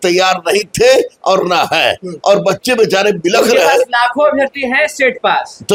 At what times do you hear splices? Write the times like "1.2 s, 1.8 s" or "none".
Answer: none